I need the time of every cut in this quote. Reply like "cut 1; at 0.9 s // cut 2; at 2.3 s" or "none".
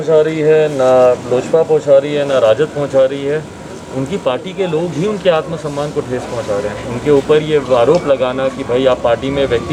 none